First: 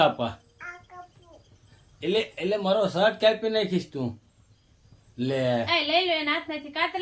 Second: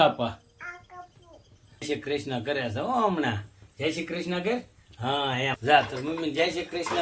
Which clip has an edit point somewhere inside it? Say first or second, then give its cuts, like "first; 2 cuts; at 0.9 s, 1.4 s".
second; 2 cuts; at 1.9 s, 5.6 s